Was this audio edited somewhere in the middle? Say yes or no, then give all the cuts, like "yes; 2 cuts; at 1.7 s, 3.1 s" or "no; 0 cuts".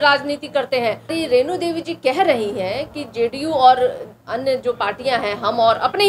yes; 1 cut; at 1.1 s